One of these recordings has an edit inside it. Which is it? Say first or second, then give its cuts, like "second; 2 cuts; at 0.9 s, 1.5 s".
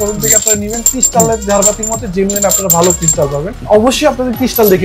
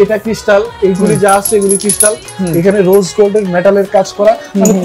first; 1 cut; at 3.6 s